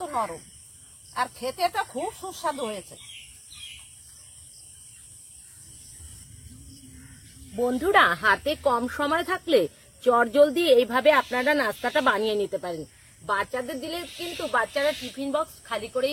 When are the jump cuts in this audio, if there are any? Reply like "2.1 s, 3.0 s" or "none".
6.0 s